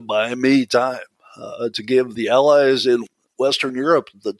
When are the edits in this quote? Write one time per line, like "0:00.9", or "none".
0:02.1
0:03.0